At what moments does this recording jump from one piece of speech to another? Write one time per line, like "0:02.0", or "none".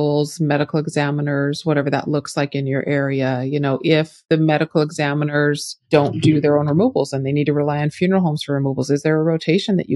0:04.2